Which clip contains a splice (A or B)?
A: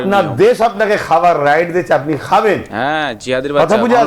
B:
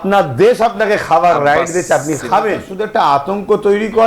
B